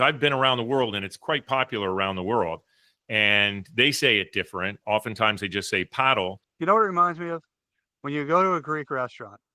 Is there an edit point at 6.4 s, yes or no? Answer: yes